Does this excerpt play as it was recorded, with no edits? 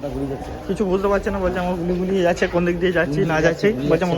no; 1 cut; at 3.0 s

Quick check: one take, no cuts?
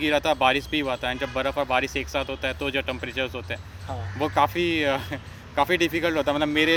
yes; 0 cuts

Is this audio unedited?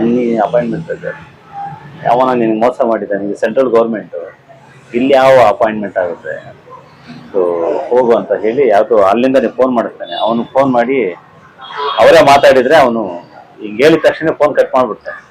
yes; 0 cuts

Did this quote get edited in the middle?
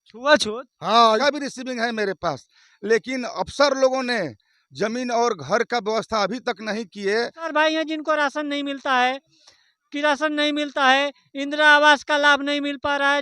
yes; 2 cuts; at 1.2 s, 7.5 s

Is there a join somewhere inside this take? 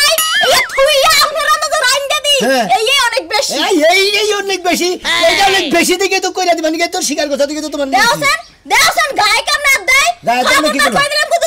no; 0 cuts

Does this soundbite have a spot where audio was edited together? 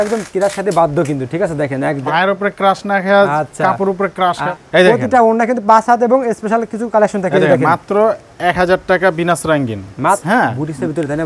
yes; 3 cuts; at 2.0 s, 4.5 s, 10.2 s

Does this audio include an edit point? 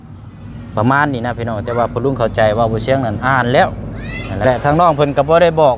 yes; 1 cut; at 4.4 s

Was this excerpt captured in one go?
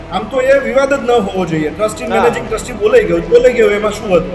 yes; 0 cuts

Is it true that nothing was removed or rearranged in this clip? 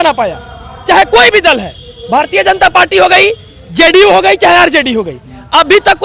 yes; 0 cuts

